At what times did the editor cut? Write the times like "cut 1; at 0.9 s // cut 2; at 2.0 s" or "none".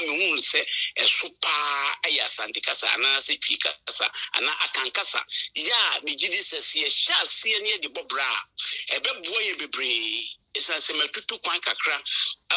none